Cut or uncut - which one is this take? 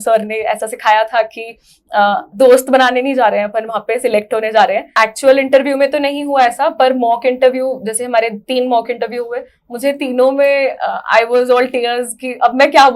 cut